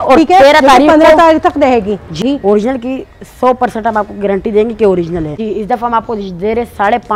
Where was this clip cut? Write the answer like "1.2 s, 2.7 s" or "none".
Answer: 2.2 s, 5.4 s